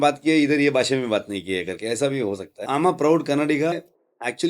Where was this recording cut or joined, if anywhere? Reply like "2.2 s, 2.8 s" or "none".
2.5 s, 3.7 s